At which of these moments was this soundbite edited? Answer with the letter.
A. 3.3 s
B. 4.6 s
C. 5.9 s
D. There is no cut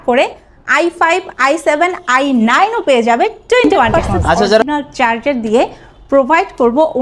B